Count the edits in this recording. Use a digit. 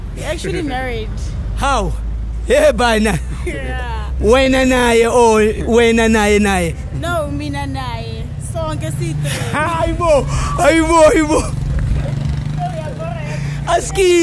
0